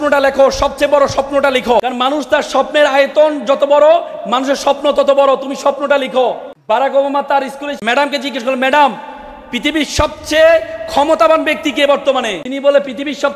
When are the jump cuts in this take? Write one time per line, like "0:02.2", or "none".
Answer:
0:01.8
0:06.5
0:07.7
0:12.4

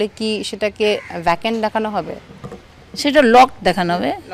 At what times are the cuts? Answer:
none

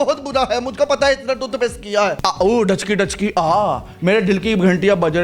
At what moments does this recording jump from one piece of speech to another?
0:02.2

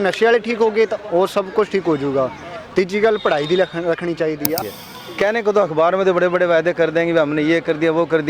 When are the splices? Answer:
0:04.6

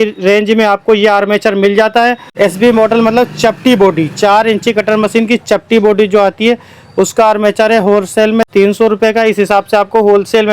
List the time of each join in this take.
0:02.3
0:08.5

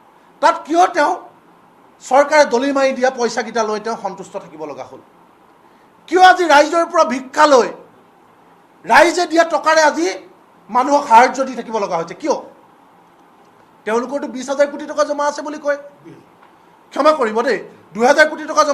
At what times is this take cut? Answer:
none

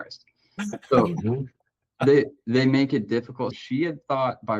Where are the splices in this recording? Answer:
0:03.5

